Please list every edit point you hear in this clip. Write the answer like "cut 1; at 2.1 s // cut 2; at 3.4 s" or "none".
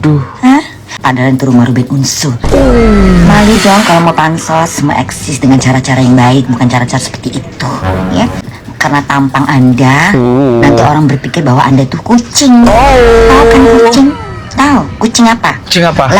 cut 1; at 1.0 s // cut 2; at 8.4 s